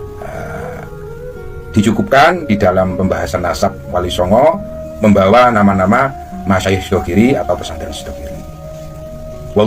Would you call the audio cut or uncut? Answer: uncut